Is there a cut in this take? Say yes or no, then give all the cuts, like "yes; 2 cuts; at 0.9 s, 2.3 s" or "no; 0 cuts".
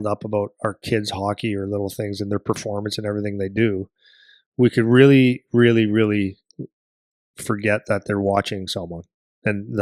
no; 0 cuts